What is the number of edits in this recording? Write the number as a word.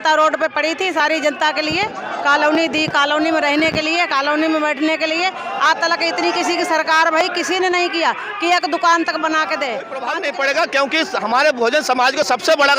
one